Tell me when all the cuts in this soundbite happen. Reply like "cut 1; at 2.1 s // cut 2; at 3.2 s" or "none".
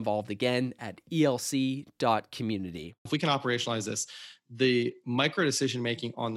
cut 1; at 3.0 s